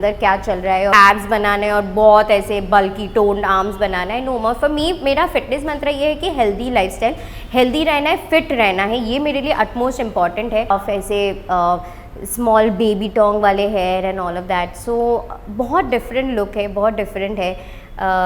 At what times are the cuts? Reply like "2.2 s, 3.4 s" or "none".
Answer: 0.9 s, 10.7 s

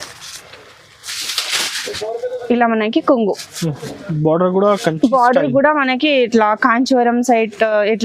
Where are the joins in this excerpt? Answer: none

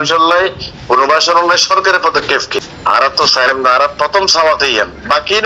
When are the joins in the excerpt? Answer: 2.7 s

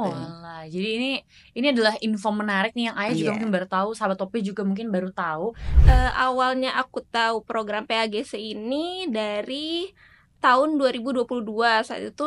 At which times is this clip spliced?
5.7 s

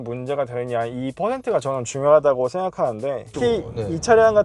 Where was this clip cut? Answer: 3.3 s

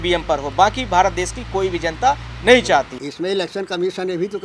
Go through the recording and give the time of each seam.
3.0 s

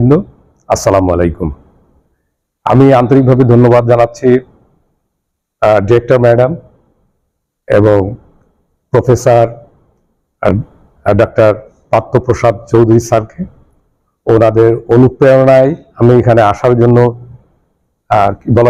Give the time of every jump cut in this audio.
none

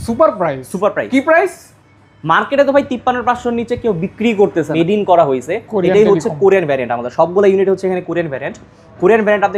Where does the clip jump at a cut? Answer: 4.7 s

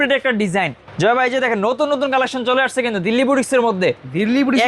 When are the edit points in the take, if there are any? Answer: 0.9 s

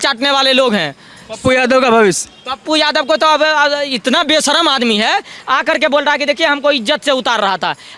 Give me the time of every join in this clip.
none

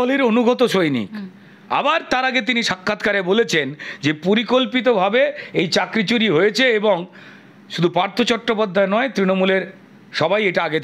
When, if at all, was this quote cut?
none

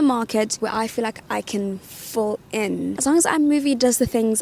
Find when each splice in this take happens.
3.0 s

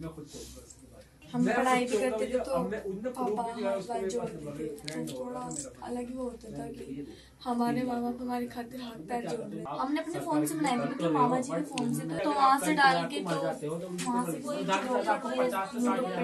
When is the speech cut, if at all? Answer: 1.2 s, 9.6 s, 12.2 s

